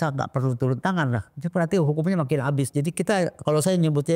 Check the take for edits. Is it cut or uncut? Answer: uncut